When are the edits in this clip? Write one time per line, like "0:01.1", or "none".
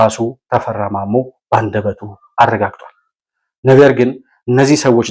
none

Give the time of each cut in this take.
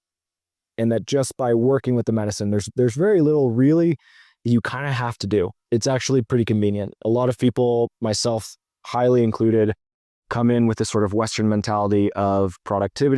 0:05.6
0:06.9

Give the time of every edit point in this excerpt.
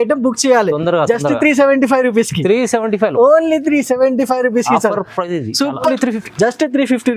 0:05.9

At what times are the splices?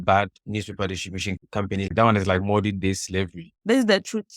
0:01.9
0:03.5

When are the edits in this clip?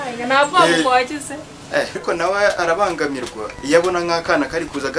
0:02.0

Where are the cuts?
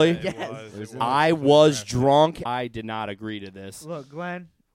0:02.4

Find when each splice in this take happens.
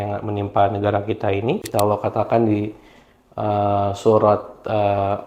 0:01.7

